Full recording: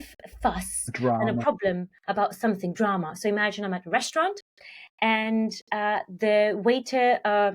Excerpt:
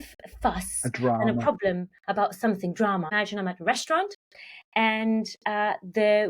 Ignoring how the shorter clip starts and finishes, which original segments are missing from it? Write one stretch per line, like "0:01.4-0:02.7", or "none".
0:03.1-0:03.4